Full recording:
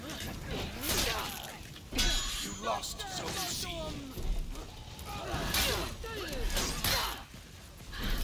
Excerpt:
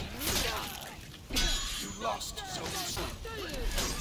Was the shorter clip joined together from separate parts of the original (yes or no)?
yes